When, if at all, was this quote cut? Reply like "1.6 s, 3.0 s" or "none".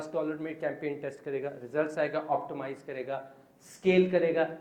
none